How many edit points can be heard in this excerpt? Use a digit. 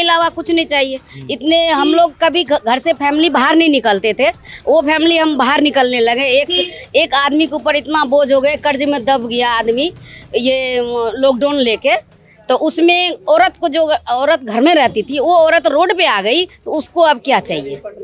0